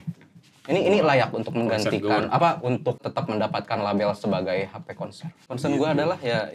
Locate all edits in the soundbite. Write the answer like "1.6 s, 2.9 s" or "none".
3.1 s, 5.5 s